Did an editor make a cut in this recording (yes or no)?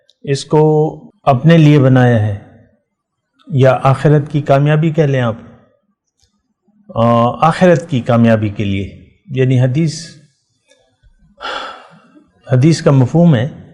yes